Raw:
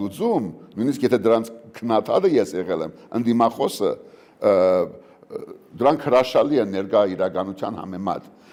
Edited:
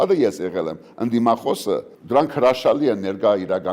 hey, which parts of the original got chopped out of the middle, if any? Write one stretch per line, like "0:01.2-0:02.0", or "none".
0:04.1-0:05.6

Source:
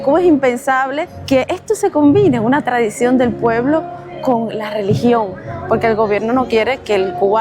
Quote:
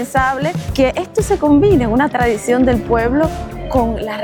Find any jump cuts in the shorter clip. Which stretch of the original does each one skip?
none

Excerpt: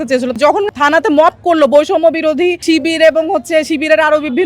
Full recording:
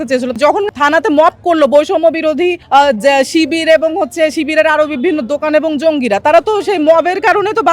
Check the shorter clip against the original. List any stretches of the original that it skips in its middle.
0:02.6-0:03.3

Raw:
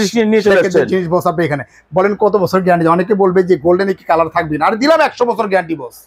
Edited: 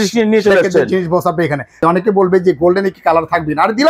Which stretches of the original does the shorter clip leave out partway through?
0:01.8-0:02.8

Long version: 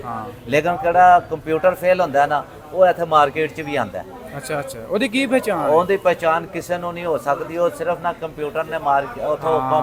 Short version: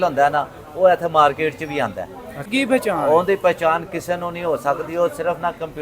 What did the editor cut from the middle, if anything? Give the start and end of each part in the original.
0:04.5-0:05.1

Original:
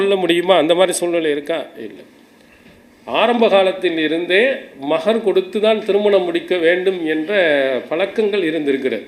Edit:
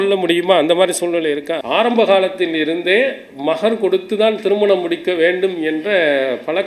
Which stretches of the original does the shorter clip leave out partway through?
0:01.6-0:03.1

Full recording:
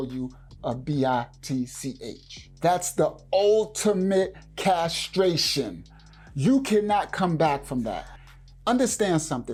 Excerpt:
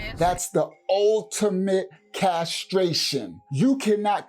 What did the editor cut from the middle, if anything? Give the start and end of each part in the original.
0:05.8-0:06.2

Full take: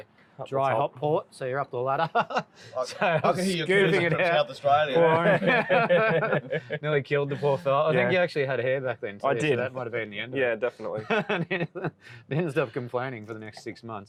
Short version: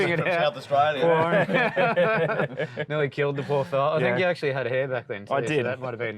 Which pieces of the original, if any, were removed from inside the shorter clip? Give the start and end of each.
none

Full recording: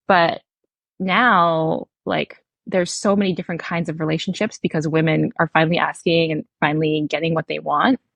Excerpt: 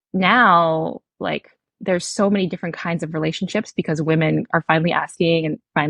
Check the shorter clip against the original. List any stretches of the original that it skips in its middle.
none

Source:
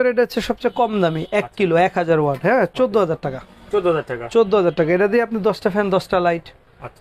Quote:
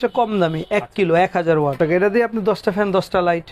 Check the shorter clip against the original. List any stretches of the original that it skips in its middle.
0:02.4-0:04.7

